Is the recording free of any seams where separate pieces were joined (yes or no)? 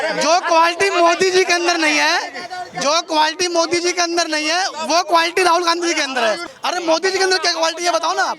no